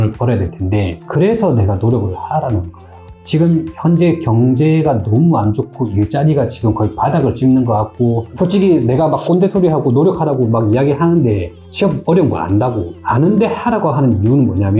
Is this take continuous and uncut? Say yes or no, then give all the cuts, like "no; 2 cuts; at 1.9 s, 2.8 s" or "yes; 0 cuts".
no; 1 cut; at 8.2 s